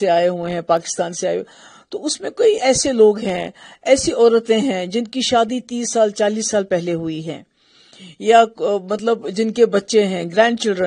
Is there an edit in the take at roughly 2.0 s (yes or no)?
no